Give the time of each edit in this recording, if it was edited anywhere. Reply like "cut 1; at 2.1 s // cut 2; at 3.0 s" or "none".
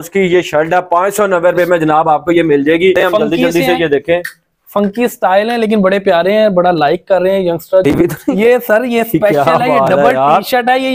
cut 1; at 3.0 s // cut 2; at 7.8 s